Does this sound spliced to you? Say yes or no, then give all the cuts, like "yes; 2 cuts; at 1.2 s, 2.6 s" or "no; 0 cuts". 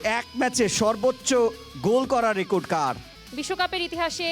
yes; 1 cut; at 3.1 s